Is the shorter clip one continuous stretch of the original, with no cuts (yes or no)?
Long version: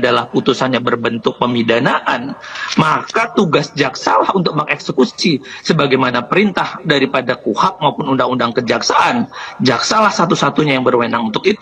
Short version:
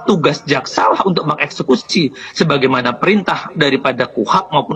yes